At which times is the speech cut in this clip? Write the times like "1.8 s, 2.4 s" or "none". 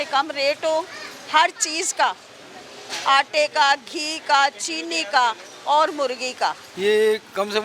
none

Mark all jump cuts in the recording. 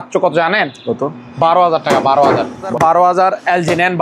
2.7 s

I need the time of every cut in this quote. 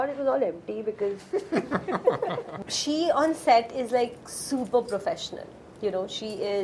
2.5 s

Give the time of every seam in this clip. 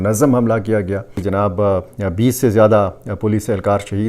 1.1 s

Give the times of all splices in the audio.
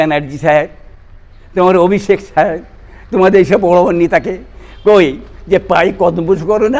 none

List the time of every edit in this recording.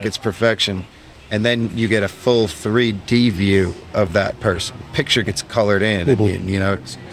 4.8 s

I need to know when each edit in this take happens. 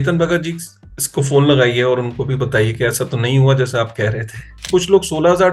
4.6 s

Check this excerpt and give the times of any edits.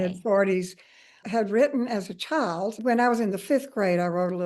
2.8 s

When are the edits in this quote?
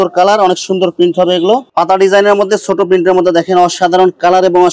1.7 s

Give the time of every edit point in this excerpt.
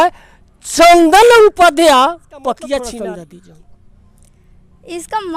2.9 s

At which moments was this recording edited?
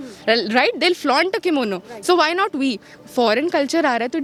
none

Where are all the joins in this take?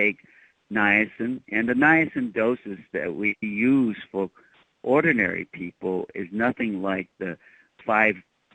none

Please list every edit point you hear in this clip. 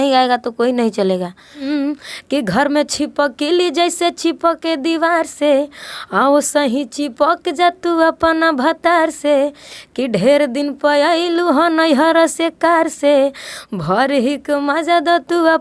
1.6 s

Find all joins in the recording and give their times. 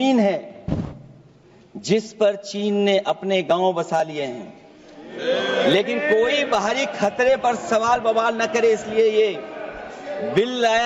none

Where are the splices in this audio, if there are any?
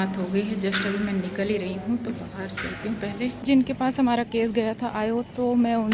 3.4 s

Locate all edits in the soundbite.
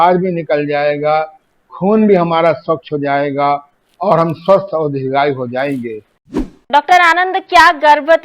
6.6 s

